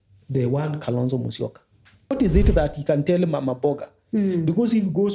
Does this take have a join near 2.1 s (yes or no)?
yes